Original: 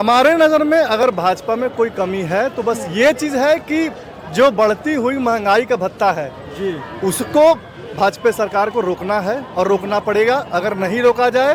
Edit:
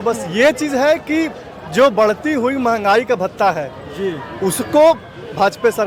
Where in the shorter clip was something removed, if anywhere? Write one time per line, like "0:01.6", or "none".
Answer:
none